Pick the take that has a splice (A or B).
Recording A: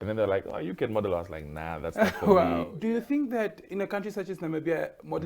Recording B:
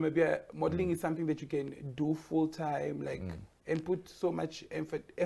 A